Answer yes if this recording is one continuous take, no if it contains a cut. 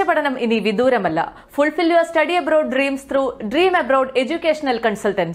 yes